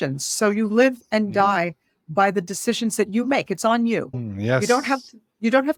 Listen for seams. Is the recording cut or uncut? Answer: uncut